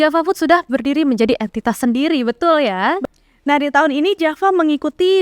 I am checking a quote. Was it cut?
yes; 1 cut; at 3.0 s

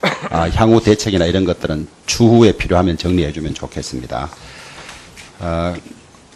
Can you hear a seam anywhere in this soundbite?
no; 0 cuts

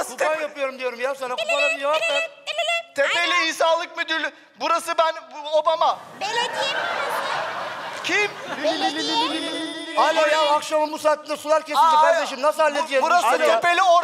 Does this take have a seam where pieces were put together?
yes; 1 cut; at 3.2 s

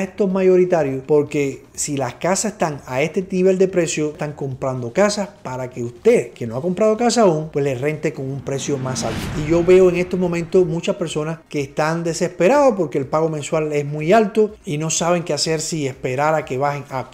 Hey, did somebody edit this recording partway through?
yes; 2 cuts; at 4.2 s, 9.3 s

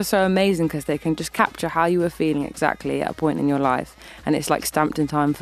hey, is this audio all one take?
no; 1 cut; at 1.3 s

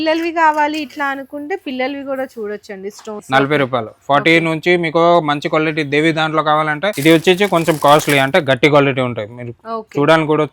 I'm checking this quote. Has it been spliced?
yes; 2 cuts; at 3.1 s, 7.0 s

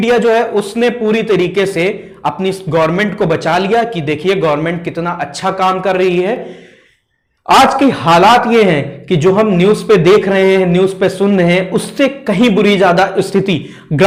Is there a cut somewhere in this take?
no; 0 cuts

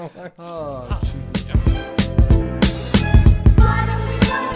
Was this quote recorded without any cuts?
no; 1 cut; at 1.1 s

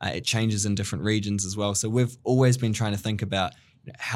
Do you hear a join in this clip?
no; 0 cuts

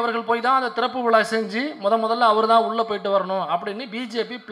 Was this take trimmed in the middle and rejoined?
no; 0 cuts

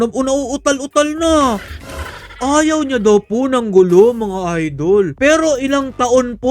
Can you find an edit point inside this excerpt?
no; 0 cuts

